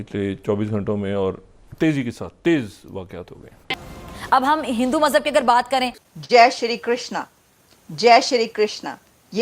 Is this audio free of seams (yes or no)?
yes